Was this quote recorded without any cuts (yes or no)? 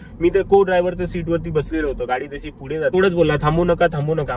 no